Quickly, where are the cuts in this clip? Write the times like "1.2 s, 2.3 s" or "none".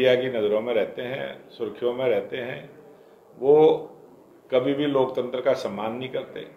none